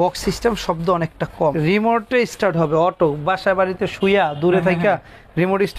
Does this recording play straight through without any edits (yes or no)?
no